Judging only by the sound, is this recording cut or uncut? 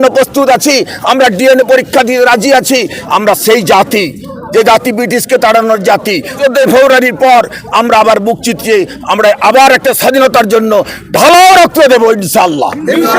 cut